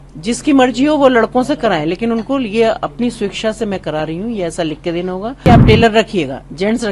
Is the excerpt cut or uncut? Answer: cut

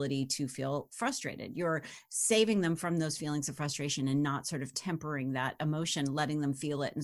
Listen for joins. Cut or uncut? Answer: uncut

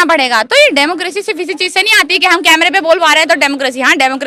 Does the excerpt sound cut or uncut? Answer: uncut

